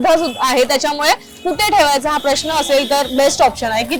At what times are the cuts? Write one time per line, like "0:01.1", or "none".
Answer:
none